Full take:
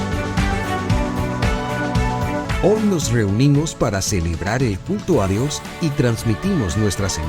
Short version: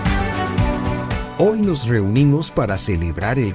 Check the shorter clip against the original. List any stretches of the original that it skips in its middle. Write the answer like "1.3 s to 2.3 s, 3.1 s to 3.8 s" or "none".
1.6 s to 2.5 s